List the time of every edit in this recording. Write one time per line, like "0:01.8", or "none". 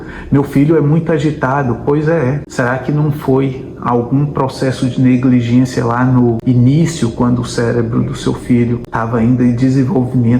0:02.4
0:06.4
0:08.9